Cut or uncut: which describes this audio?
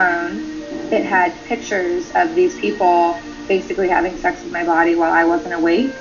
uncut